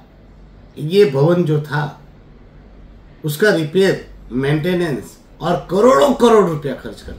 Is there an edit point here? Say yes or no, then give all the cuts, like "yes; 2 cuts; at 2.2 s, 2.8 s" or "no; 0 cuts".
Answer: no; 0 cuts